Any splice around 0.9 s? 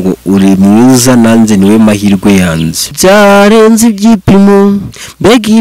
no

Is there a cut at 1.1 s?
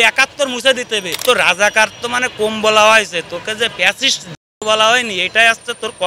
yes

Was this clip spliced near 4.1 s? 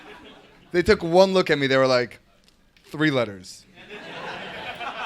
no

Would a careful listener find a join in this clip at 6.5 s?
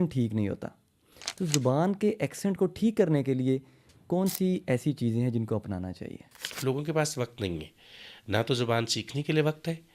yes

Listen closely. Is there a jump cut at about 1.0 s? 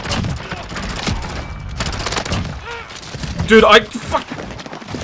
no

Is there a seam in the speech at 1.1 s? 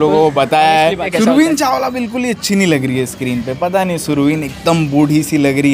yes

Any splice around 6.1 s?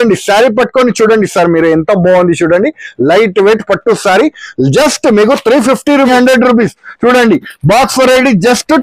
yes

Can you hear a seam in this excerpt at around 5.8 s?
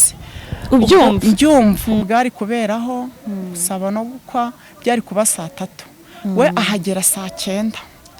no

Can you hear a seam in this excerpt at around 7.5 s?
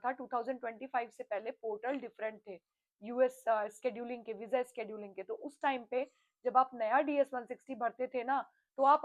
no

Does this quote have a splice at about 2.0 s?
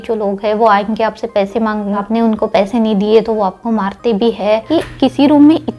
yes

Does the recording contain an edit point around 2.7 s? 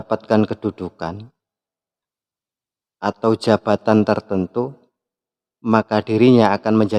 no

